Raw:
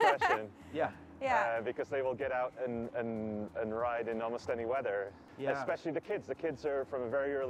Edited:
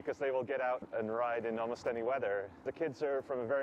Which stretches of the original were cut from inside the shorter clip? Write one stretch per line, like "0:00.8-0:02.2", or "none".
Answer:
0:02.5-0:03.5
0:05.3-0:06.3